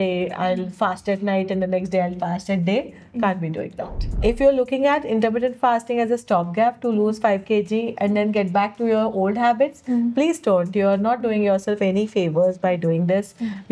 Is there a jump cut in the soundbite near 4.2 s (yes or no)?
yes